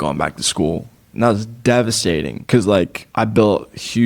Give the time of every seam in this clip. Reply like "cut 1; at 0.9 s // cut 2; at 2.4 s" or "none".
cut 1; at 2.4 s // cut 2; at 3.0 s